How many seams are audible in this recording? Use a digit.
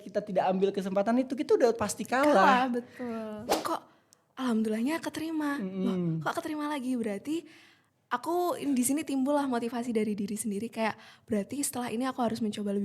1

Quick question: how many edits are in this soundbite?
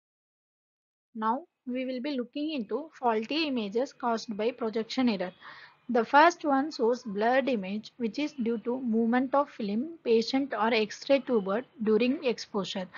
1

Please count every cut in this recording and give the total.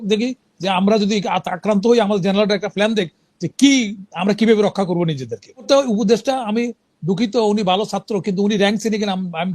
1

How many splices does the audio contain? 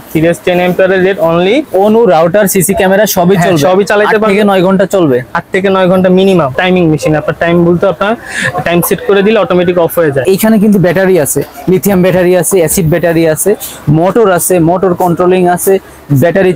3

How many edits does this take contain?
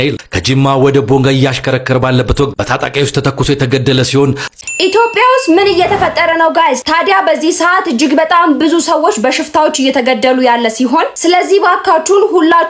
1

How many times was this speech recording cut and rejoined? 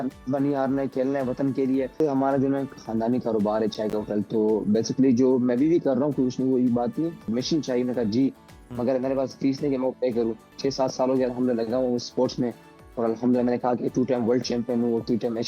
3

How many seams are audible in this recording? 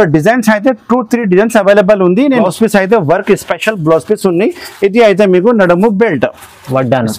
1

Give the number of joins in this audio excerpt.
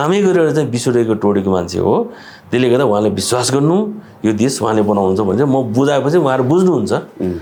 0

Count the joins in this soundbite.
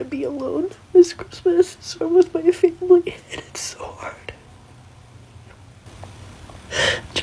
1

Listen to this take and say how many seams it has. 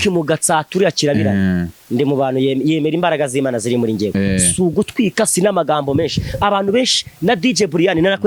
0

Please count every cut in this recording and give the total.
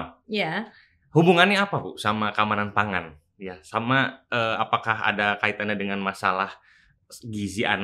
0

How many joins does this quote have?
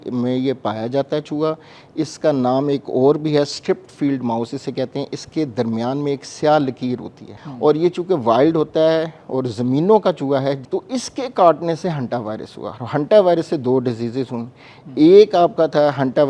2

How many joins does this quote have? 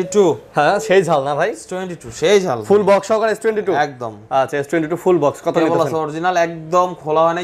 0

